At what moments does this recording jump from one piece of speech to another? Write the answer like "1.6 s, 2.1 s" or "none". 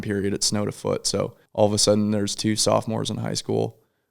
1.4 s